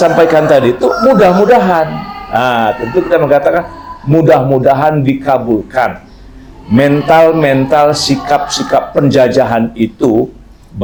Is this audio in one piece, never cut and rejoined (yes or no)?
yes